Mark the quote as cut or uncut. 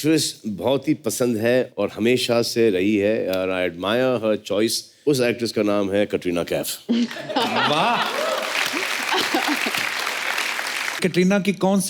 cut